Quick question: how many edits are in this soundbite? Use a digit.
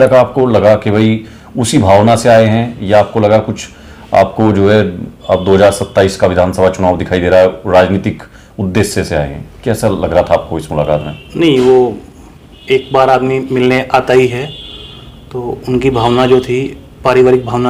0